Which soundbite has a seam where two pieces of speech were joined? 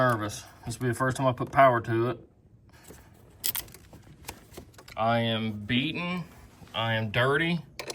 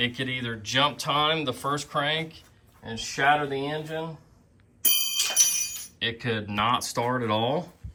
first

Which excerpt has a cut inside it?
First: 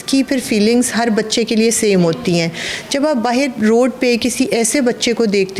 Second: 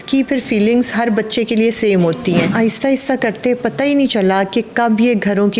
second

